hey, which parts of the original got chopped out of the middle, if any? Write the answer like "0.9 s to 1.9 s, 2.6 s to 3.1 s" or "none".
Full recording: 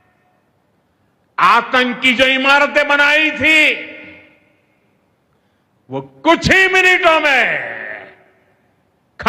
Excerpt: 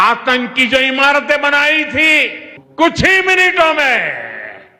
4.1 s to 6.1 s

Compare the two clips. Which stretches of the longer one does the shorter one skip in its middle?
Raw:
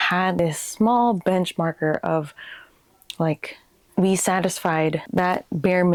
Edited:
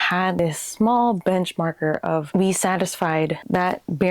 2.3 s to 3.9 s

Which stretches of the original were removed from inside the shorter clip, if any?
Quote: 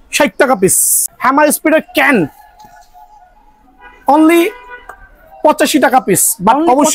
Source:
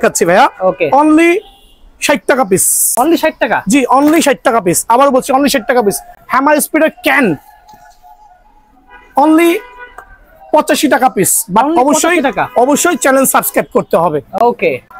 2.8 s to 6.0 s

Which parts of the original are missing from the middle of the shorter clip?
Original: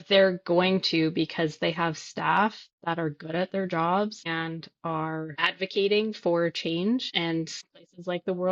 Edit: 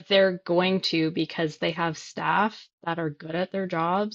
none

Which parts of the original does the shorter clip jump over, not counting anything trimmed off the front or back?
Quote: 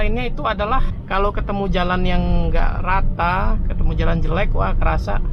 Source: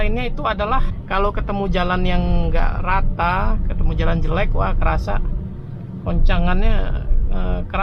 none

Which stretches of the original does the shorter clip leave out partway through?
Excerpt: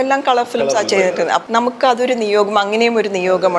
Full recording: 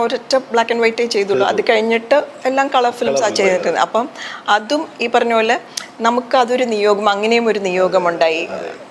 3.9 s to 5.9 s

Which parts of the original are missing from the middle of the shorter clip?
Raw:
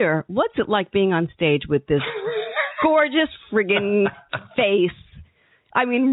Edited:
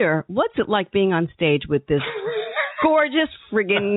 none

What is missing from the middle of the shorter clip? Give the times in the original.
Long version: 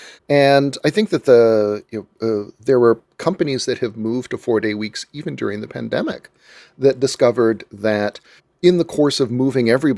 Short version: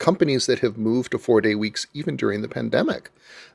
none

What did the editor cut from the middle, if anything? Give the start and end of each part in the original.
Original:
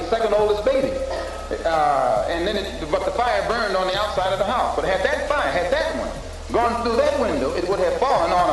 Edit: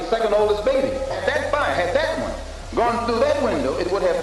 1.2 s to 5.0 s

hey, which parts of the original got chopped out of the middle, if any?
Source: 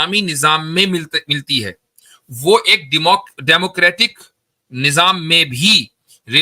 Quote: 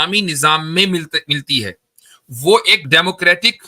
2.8 s to 3.3 s

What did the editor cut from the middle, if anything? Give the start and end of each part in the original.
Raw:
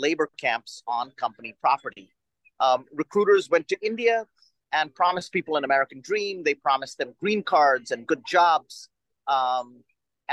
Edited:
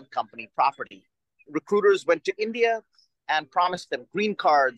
2.5 s to 2.9 s, 5.2 s to 6.9 s

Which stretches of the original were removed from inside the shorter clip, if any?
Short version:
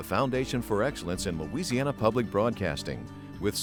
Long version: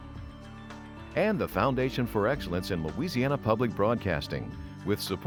none

